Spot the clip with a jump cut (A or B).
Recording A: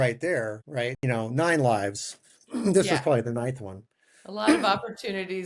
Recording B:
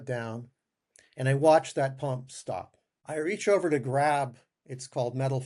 A